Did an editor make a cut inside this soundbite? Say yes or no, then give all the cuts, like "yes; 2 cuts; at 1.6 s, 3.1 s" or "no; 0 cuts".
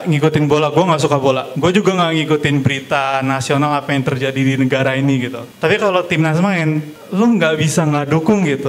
yes; 3 cuts; at 1.5 s, 5.4 s, 7.0 s